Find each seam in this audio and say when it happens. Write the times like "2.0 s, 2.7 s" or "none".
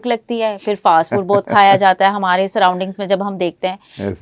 none